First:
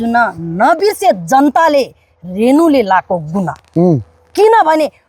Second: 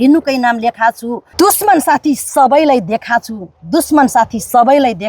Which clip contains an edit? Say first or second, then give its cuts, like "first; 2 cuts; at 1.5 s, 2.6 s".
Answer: second; 1 cut; at 1.2 s